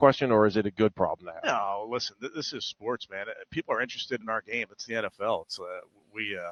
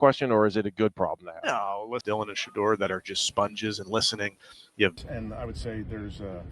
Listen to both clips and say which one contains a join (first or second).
second